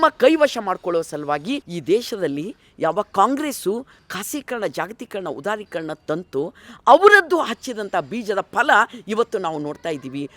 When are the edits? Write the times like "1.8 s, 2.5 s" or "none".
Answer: 1.7 s